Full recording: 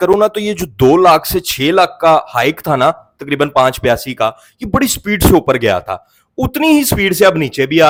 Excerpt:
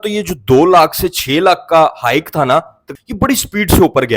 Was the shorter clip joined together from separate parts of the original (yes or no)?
yes